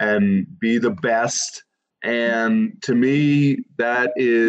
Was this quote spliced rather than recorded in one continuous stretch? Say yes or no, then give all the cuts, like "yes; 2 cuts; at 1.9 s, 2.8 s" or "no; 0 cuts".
yes; 1 cut; at 1.9 s